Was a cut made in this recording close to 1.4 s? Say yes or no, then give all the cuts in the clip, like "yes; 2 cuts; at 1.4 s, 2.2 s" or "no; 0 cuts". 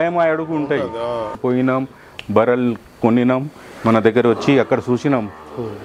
yes; 1 cut; at 1.4 s